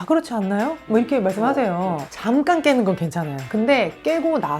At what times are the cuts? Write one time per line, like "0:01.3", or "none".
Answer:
0:03.4